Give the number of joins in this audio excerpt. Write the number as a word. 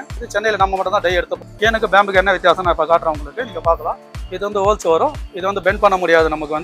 one